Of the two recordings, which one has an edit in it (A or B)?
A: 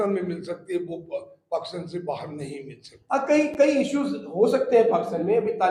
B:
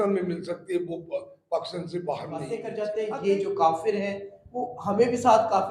B